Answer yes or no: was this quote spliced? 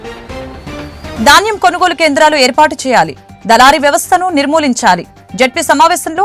yes